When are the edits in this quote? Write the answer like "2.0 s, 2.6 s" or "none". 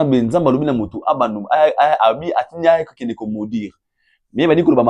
none